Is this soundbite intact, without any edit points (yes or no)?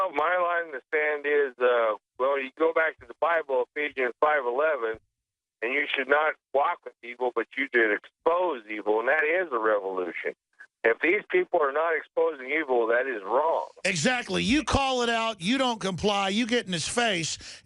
no